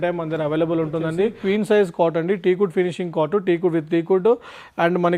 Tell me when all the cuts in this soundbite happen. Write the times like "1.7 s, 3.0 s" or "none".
1.4 s